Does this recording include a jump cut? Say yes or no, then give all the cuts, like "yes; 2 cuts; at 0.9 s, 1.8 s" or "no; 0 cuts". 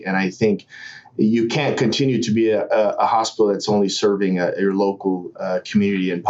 no; 0 cuts